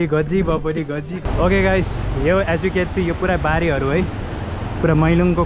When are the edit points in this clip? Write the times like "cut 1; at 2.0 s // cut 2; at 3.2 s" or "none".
cut 1; at 1.2 s